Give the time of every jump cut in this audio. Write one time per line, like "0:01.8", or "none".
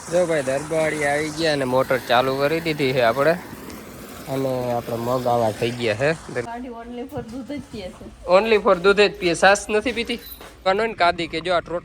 0:06.5
0:10.6